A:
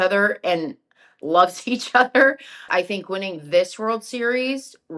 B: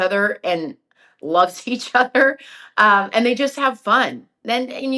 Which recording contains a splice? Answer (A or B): A